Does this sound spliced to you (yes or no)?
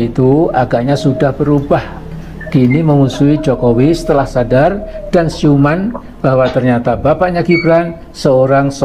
no